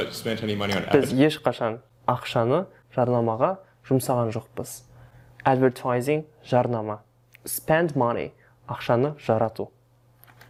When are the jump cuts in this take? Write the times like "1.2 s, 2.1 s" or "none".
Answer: none